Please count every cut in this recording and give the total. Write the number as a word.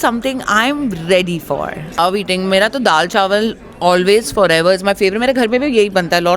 one